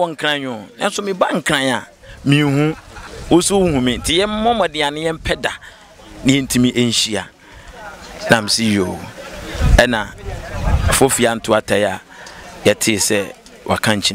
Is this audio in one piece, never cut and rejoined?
yes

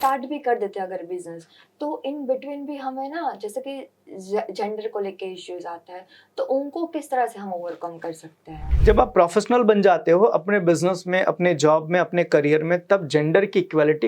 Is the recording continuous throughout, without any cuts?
no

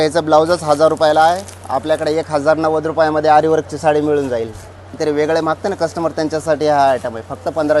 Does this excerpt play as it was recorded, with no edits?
no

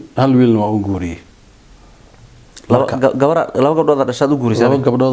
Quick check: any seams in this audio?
no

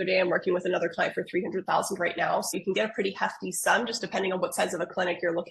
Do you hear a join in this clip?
yes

